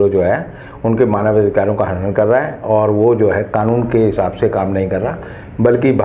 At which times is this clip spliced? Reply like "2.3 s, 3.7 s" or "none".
none